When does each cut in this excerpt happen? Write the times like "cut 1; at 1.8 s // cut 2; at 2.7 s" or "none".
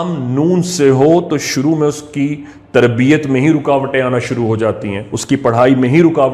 none